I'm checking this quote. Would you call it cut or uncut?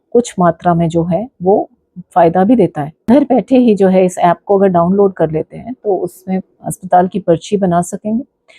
cut